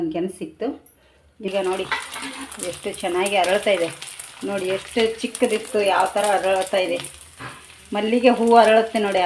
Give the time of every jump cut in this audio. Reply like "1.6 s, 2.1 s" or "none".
1.5 s